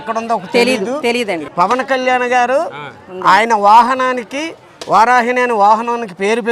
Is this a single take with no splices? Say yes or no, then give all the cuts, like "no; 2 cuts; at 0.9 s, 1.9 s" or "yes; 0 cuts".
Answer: no; 1 cut; at 1.4 s